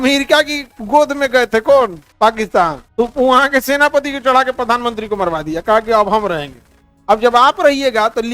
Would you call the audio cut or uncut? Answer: cut